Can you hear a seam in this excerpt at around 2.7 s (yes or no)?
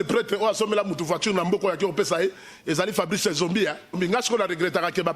no